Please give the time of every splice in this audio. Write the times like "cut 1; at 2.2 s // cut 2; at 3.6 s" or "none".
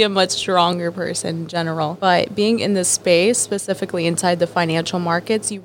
cut 1; at 2.0 s